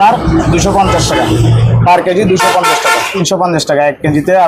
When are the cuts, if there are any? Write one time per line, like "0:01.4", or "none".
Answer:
0:03.2